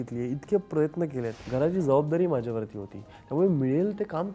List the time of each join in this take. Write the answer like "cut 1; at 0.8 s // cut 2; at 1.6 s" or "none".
cut 1; at 1.4 s